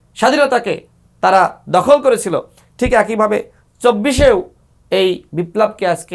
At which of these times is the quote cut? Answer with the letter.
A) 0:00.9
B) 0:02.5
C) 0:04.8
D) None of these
D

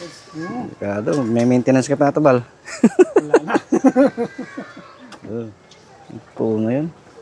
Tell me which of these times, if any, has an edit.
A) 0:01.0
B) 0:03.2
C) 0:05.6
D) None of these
C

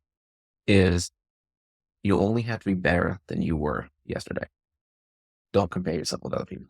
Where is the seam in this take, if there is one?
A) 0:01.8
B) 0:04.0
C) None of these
A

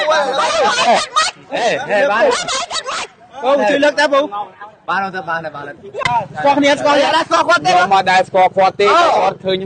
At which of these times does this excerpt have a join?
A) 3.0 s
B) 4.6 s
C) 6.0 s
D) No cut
C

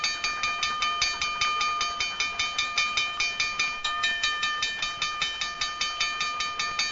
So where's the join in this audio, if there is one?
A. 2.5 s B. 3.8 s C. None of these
B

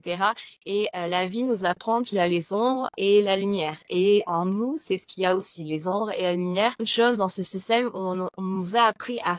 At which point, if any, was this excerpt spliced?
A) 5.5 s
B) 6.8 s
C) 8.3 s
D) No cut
B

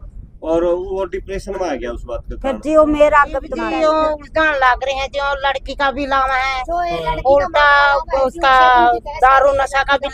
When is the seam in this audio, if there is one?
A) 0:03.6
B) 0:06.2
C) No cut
A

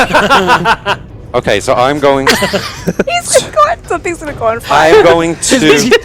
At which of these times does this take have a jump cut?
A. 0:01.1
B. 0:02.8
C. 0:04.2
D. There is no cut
A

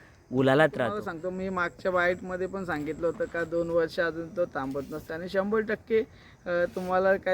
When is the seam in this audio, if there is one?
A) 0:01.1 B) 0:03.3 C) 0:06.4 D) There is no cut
A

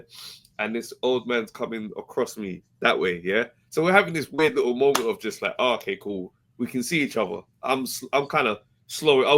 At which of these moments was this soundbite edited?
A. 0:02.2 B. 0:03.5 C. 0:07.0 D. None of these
D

